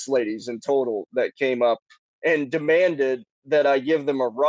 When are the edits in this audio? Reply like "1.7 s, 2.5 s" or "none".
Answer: none

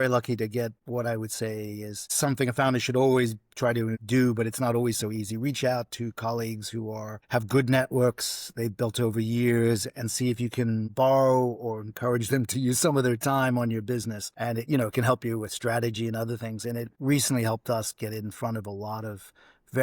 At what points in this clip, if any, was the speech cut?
0.8 s, 2.0 s, 4.0 s

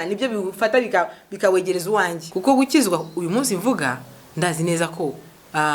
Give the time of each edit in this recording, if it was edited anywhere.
2.2 s

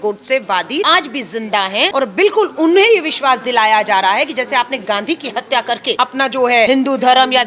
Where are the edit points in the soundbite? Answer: 0.9 s, 1.9 s, 6.0 s, 6.7 s

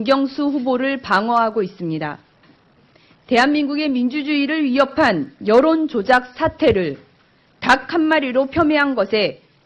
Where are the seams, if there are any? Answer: 7.8 s

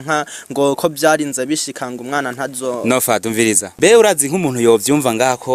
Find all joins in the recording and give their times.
none

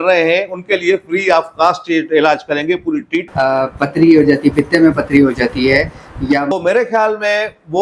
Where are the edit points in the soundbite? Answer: 3.2 s, 6.5 s

